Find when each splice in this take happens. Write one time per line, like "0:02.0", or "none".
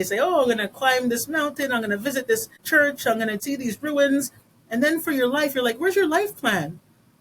0:02.5
0:03.4